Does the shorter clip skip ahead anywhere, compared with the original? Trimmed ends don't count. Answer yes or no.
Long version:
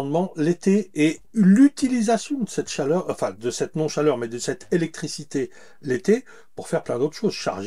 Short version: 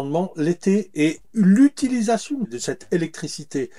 yes